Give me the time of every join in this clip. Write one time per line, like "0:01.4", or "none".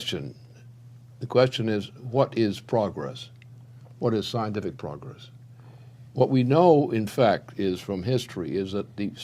0:05.9

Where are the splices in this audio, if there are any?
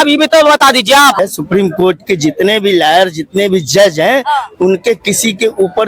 0:01.2

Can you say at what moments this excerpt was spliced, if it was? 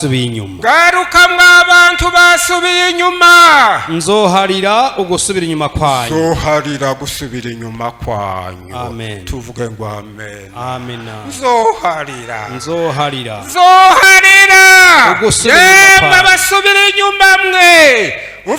none

